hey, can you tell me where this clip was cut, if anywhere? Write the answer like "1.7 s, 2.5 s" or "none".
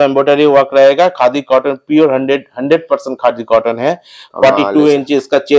none